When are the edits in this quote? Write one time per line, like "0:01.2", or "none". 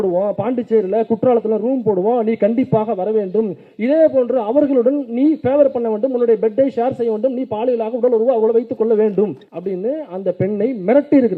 none